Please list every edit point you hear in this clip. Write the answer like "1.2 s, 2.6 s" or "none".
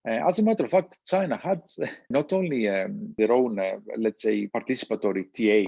2.1 s, 3.1 s, 4.5 s

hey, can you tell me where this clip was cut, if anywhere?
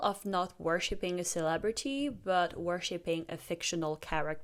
none

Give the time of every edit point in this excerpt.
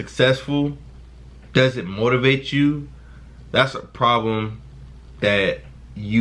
none

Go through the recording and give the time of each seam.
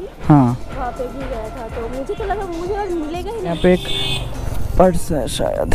3.5 s

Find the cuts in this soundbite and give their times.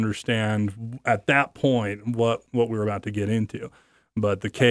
none

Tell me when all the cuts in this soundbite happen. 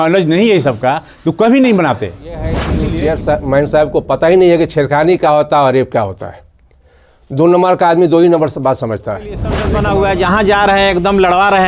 2.8 s, 9.6 s

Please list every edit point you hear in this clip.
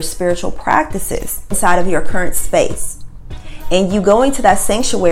1.6 s

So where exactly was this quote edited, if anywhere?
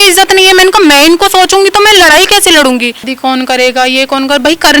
3.1 s

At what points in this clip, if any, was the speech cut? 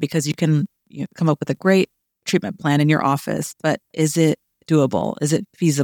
none

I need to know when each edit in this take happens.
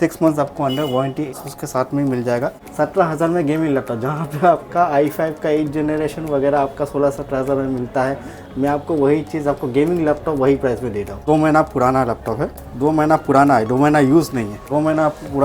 1.4 s, 2.6 s, 11.2 s, 12.6 s, 14.6 s

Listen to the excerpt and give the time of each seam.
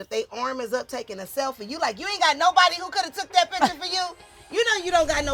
none

